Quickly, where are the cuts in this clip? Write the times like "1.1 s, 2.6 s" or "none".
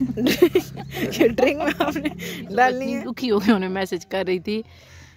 2.8 s